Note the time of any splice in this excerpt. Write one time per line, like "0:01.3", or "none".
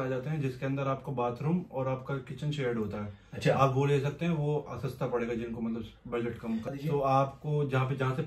0:06.7